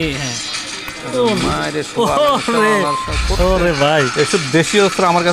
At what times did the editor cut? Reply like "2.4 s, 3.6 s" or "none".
none